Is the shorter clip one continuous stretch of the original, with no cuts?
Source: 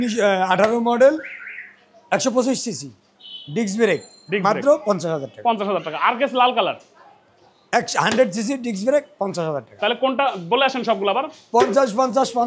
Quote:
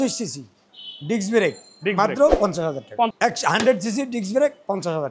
no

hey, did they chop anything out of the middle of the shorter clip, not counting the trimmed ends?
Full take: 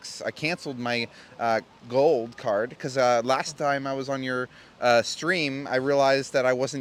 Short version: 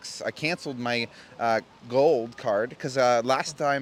no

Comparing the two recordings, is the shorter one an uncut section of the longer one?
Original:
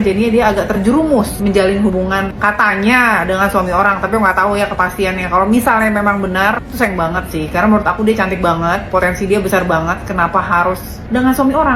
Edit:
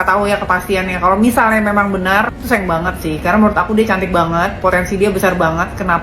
yes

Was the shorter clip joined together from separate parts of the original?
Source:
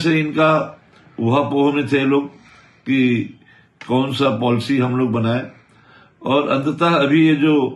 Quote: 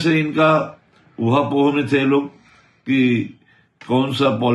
no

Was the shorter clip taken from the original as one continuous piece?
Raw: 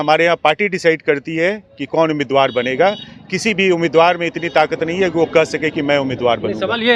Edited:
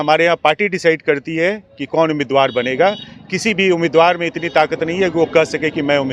yes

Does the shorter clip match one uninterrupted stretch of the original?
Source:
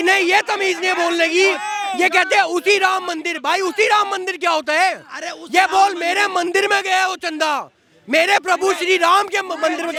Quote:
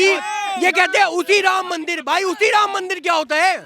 yes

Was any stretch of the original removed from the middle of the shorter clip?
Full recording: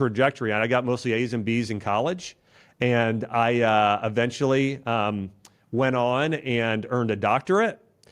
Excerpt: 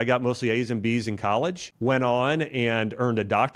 yes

